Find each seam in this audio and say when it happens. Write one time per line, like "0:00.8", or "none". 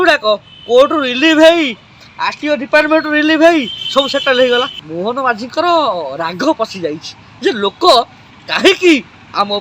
0:04.8